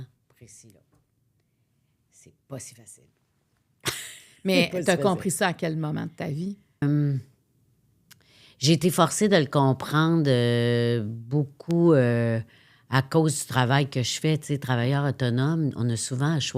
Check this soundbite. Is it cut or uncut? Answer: cut